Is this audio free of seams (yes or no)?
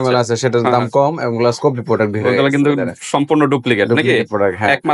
yes